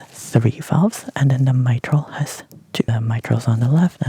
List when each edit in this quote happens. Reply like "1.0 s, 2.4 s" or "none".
2.9 s